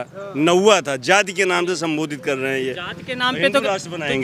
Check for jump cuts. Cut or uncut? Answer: uncut